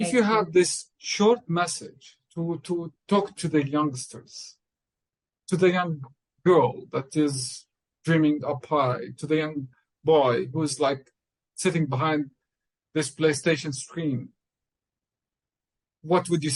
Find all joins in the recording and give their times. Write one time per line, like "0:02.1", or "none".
none